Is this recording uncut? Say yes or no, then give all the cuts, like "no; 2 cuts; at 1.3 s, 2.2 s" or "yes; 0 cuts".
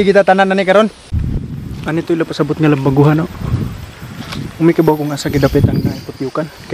no; 1 cut; at 1.2 s